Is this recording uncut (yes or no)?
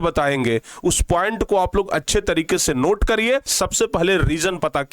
no